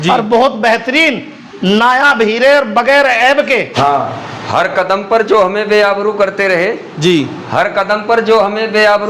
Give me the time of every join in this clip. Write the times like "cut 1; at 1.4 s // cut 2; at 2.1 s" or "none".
cut 1; at 3.7 s